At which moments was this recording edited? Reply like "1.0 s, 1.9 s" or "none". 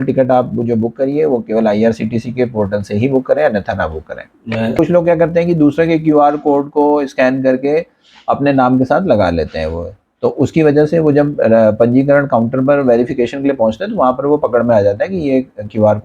4.8 s